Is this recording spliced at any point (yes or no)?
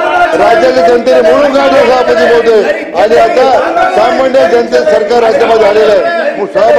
no